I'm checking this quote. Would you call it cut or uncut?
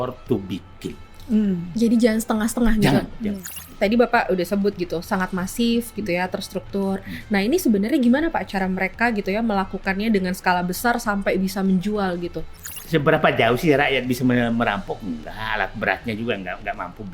cut